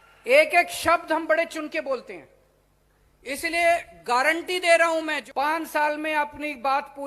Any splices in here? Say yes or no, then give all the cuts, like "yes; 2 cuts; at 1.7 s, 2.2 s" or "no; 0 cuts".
yes; 1 cut; at 5.2 s